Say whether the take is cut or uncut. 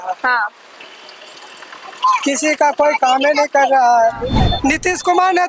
cut